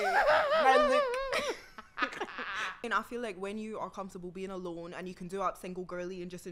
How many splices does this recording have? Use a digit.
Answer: 1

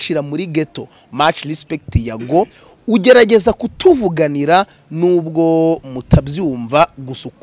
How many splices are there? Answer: 0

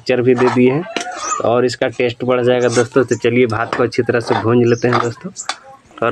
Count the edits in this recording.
0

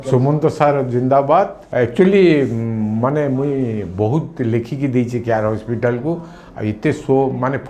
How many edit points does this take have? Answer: 1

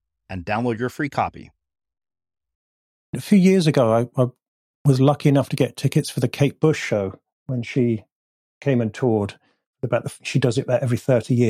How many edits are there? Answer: 1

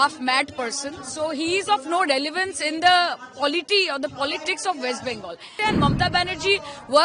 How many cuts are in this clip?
1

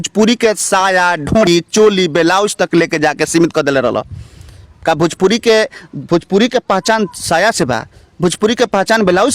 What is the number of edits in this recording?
1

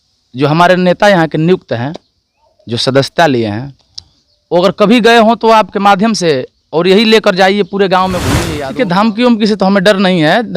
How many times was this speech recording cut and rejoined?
1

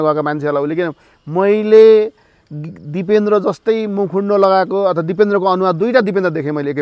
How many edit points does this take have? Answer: 0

